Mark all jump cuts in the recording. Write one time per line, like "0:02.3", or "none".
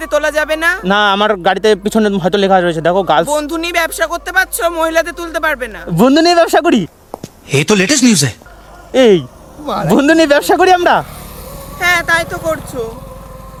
none